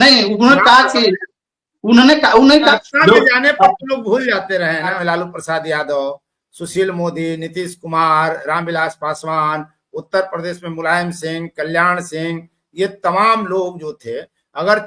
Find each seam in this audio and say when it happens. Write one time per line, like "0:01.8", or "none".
0:02.7
0:05.0